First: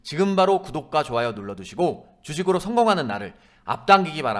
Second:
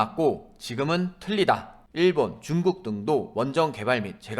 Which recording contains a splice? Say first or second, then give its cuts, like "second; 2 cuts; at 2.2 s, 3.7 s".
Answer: second; 1 cut; at 1.8 s